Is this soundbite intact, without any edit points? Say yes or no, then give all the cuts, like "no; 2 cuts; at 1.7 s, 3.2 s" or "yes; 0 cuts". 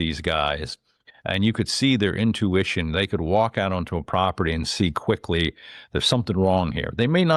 yes; 0 cuts